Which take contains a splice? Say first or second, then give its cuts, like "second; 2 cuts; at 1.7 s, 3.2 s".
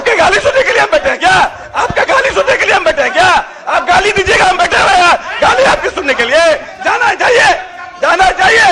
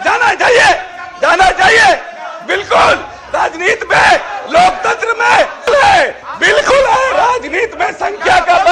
second; 1 cut; at 5.7 s